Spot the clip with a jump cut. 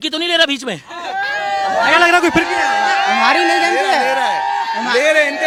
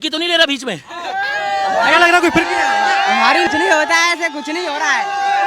second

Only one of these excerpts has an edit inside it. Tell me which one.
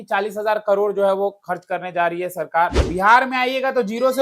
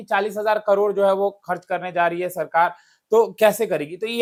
first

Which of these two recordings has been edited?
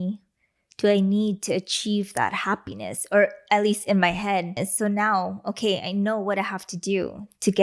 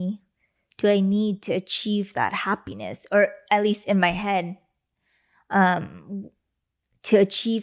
first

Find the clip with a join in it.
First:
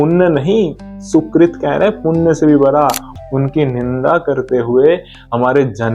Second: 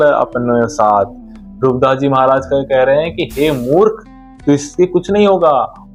first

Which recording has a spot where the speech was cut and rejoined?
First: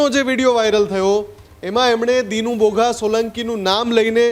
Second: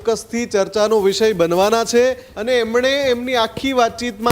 second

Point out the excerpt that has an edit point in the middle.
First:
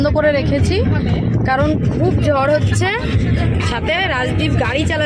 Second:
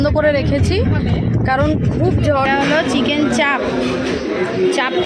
second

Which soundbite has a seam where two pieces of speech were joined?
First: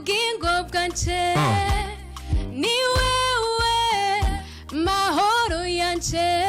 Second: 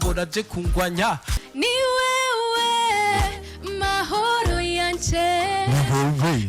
second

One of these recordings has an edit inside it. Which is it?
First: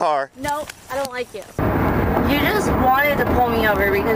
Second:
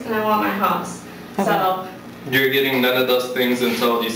first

